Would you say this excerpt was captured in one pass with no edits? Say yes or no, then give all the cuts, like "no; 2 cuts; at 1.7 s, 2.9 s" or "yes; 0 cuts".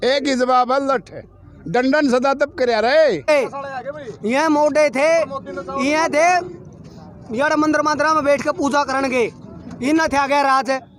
no; 1 cut; at 3.3 s